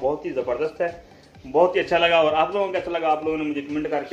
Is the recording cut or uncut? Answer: uncut